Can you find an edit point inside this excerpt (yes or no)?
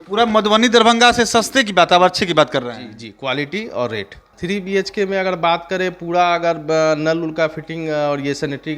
yes